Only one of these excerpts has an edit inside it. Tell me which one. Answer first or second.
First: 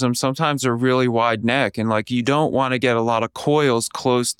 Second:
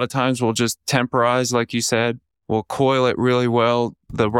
second